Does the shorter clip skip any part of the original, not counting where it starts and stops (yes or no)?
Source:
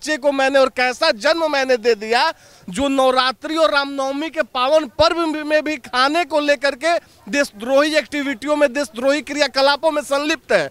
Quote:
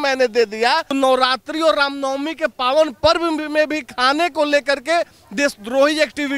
yes